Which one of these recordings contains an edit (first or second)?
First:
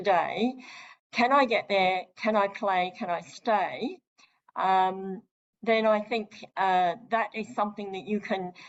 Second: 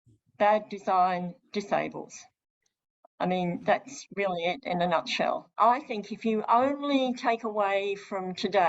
second